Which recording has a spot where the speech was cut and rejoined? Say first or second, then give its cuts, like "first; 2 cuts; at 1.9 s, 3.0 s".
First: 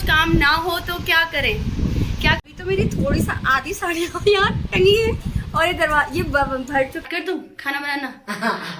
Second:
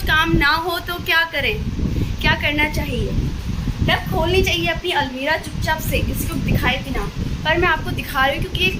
first; 2 cuts; at 2.4 s, 7.0 s